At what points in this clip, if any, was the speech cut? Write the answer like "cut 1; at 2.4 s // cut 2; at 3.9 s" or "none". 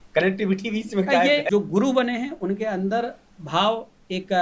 cut 1; at 1.5 s